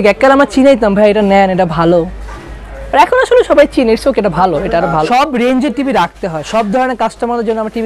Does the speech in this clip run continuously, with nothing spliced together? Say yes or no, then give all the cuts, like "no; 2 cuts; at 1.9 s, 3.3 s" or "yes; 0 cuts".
no; 1 cut; at 5.1 s